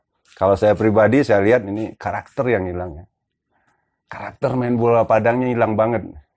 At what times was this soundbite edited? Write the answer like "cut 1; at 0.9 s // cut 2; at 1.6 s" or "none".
none